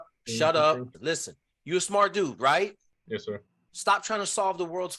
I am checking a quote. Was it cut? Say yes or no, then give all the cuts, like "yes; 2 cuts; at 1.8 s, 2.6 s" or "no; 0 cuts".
yes; 1 cut; at 2.9 s